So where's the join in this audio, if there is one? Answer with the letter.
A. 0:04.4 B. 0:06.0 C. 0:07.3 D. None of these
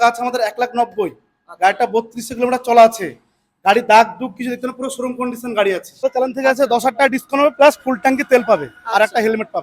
B